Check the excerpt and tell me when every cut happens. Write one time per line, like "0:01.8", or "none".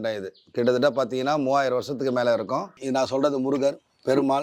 0:02.7